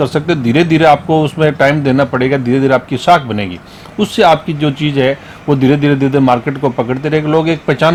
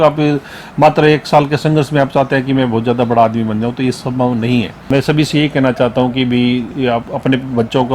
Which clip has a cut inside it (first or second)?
second